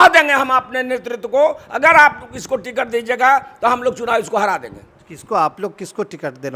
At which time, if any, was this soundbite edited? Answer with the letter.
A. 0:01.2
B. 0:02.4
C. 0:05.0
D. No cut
D